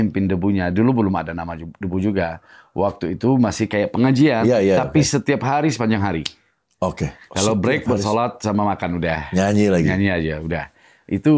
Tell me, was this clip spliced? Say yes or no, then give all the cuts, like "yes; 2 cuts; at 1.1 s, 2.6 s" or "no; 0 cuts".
no; 0 cuts